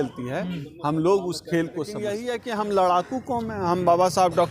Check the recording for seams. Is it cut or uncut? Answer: cut